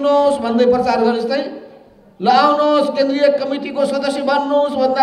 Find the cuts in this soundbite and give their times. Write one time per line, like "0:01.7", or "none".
none